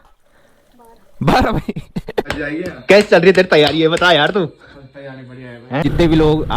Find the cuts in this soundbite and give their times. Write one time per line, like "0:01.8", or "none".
0:02.3
0:05.8